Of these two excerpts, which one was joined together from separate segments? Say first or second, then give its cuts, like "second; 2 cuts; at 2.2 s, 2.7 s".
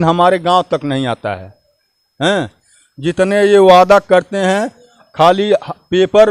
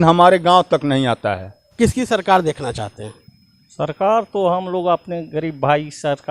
second; 1 cut; at 1.7 s